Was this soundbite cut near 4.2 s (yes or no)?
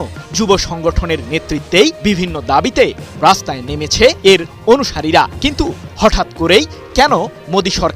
yes